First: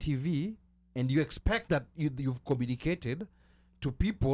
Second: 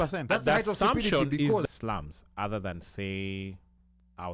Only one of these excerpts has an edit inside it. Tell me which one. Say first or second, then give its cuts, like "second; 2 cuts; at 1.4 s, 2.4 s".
second; 1 cut; at 1.6 s